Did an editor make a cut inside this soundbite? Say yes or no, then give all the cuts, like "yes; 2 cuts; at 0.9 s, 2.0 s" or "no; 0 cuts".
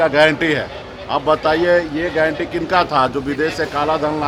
no; 0 cuts